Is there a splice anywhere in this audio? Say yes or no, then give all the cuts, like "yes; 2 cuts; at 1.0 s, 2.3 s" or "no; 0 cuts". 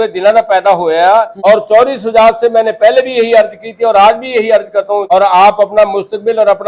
yes; 2 cuts; at 1.3 s, 5.0 s